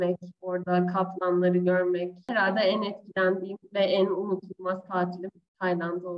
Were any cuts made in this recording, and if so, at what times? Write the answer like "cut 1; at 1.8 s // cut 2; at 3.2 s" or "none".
cut 1; at 2.2 s